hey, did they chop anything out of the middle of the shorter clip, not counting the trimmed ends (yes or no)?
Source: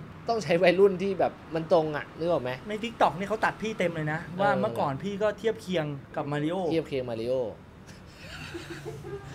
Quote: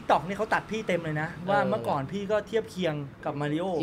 no